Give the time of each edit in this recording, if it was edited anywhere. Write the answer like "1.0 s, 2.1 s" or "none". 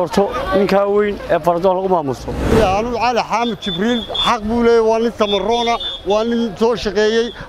2.4 s